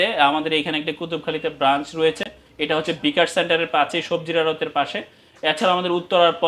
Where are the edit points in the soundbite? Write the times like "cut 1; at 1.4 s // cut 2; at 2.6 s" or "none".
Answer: none